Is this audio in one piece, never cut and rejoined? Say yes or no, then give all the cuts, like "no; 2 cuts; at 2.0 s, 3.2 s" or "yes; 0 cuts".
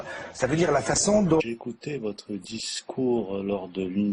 yes; 0 cuts